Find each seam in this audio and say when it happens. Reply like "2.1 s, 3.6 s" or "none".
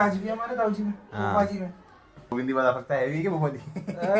2.3 s

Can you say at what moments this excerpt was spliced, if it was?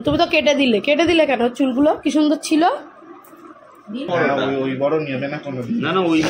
4.1 s

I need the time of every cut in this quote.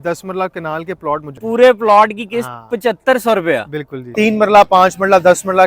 1.3 s, 4.1 s

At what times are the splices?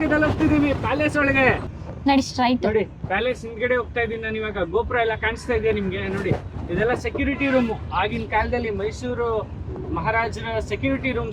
1.7 s

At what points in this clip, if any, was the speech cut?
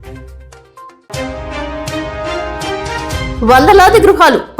1.0 s, 3.3 s

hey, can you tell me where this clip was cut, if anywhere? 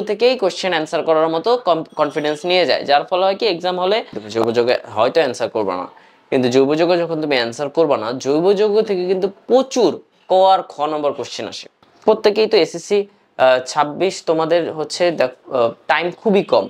4.2 s, 11.8 s

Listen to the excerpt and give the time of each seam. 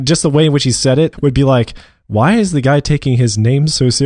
1.2 s

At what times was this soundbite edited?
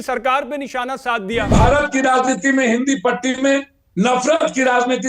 1.5 s

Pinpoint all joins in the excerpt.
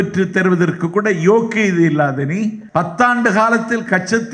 2.6 s

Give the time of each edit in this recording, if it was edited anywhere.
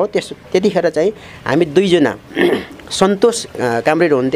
none

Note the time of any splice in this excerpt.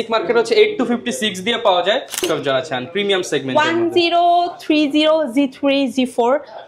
2.2 s

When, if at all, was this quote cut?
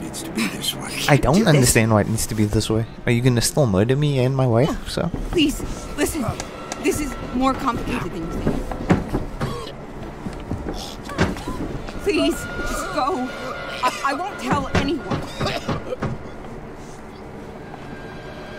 none

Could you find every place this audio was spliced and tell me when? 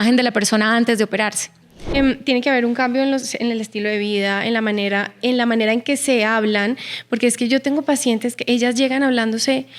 2.0 s

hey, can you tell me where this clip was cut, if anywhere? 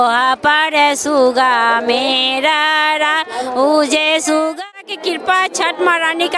4.6 s

